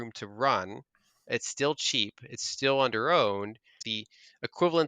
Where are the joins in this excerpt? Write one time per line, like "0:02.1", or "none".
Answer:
0:03.8

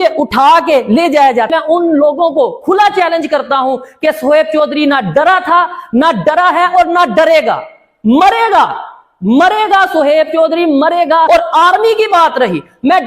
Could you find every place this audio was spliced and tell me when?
0:01.5
0:11.3

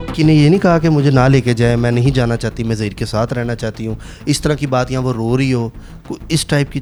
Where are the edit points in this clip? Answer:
none

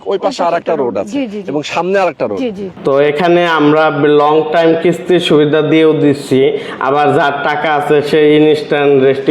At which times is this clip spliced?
0:02.7

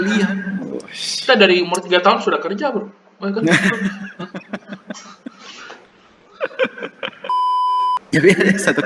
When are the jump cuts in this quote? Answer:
0:07.5

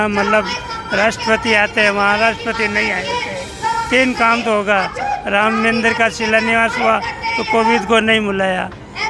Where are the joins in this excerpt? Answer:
none

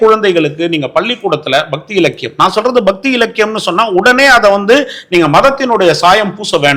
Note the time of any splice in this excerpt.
none

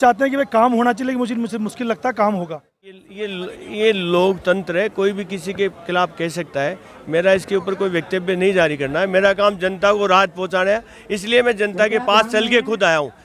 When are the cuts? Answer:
0:03.0

